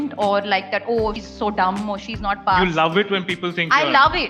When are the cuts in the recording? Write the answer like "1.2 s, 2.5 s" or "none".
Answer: none